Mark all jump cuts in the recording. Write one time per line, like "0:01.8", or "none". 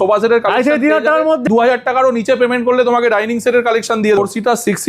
0:01.5
0:04.2